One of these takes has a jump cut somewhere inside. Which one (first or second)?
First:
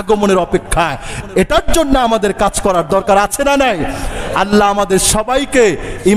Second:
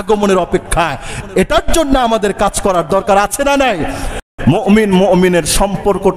second